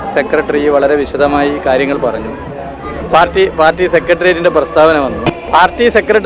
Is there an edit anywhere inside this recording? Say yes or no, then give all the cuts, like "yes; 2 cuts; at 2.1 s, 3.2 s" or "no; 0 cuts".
yes; 1 cut; at 5.3 s